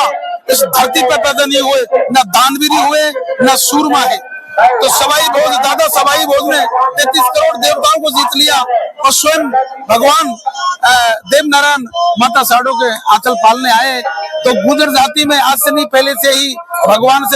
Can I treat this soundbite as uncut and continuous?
yes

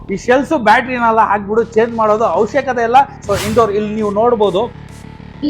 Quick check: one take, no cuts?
no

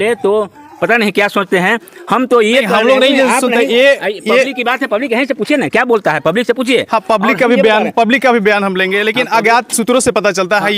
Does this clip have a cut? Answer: no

